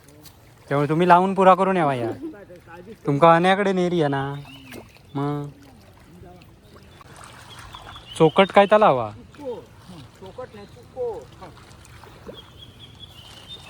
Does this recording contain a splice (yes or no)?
yes